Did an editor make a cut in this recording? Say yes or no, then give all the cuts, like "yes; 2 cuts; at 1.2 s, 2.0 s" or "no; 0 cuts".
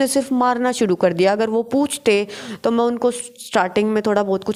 no; 0 cuts